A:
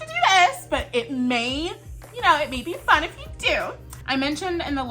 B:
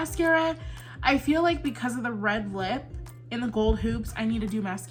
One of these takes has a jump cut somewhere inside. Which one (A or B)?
A